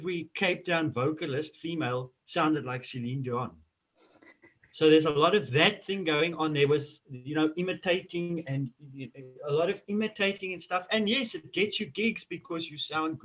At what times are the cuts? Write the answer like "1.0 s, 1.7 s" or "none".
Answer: none